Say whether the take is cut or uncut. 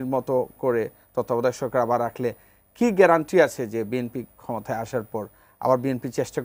uncut